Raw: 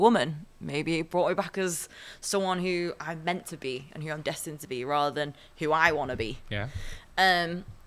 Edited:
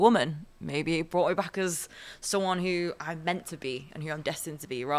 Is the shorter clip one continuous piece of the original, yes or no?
yes